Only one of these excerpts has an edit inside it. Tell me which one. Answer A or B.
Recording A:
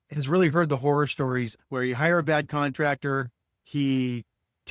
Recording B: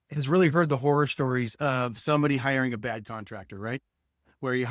A